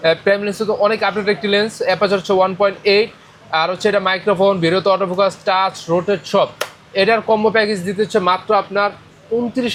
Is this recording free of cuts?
yes; 0 cuts

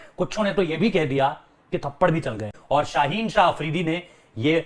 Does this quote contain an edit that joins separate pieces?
yes; 1 cut; at 2.5 s

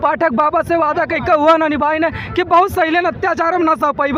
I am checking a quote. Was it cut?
no; 0 cuts

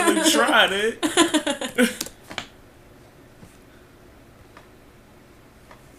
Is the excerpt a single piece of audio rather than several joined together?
yes; 0 cuts

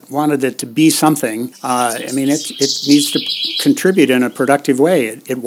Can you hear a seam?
yes; 1 cut; at 1.5 s

